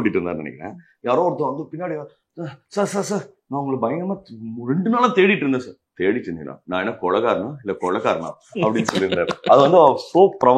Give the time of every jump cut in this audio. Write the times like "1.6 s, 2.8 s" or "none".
none